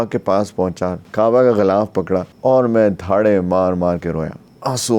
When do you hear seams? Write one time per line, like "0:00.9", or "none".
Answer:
0:01.0
0:02.3